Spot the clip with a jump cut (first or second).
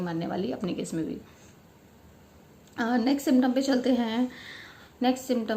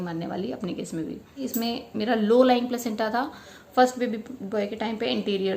second